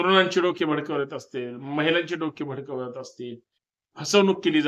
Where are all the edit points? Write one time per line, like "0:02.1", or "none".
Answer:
none